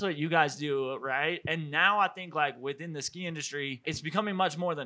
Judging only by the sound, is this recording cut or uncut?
cut